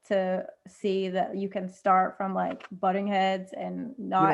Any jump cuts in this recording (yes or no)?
no